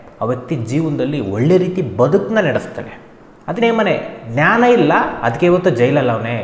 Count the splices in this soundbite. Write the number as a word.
one